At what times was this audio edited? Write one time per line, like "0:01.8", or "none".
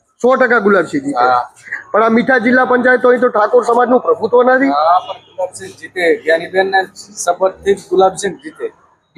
none